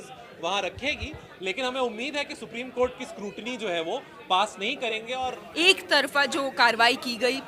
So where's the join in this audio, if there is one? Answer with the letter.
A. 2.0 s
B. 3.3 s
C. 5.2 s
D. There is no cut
C